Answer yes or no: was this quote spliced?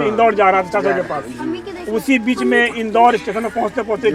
no